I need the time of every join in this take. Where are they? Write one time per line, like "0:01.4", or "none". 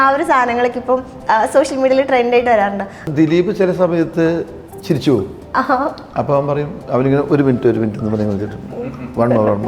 0:02.9